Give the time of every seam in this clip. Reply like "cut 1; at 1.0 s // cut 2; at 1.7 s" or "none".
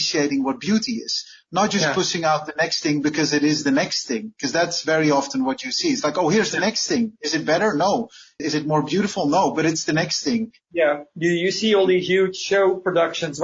cut 1; at 10.6 s